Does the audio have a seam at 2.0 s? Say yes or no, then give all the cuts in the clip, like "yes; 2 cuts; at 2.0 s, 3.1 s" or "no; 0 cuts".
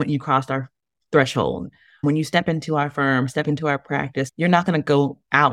yes; 2 cuts; at 2.0 s, 4.3 s